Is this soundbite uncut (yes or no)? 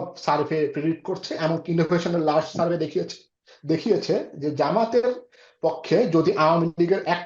yes